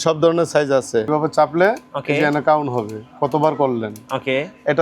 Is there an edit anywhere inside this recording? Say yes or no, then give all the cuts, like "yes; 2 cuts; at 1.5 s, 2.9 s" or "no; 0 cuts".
yes; 1 cut; at 1.1 s